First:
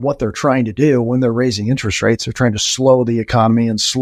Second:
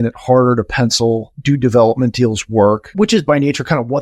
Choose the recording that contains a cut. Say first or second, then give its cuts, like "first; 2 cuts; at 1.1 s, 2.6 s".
second; 2 cuts; at 1.3 s, 2.9 s